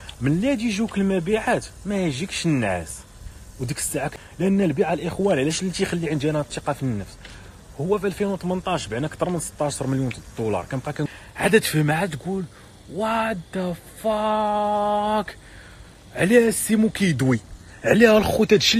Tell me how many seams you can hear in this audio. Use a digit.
2